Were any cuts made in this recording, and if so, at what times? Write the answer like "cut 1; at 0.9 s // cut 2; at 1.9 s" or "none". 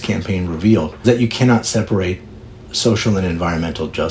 cut 1; at 1.0 s // cut 2; at 2.6 s